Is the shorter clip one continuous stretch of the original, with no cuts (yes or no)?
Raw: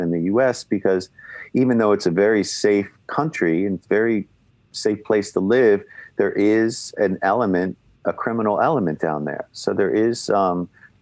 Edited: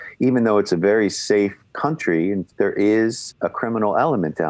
no